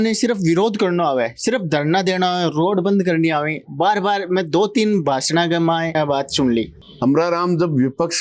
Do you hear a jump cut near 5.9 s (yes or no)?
yes